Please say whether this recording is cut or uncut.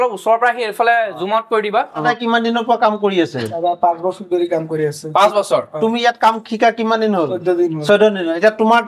cut